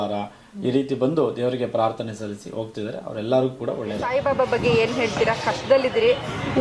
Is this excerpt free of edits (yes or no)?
no